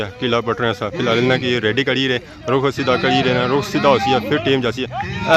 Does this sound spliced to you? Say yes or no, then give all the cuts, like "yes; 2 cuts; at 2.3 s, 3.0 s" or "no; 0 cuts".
no; 0 cuts